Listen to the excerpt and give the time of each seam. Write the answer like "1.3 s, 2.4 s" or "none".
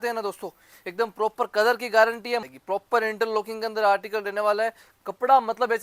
2.4 s